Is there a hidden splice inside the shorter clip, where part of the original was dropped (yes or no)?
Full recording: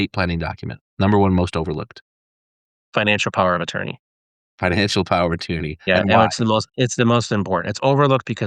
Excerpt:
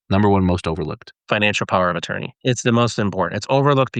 yes